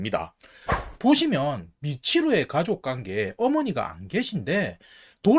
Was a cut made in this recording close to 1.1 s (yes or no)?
yes